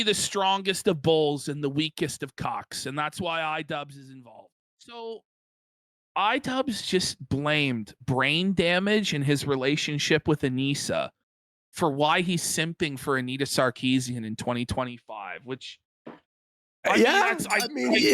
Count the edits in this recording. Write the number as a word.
one